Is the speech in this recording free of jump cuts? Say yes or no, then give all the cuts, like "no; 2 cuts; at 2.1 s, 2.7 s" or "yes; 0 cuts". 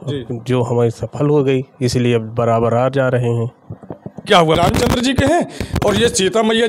no; 1 cut; at 4.6 s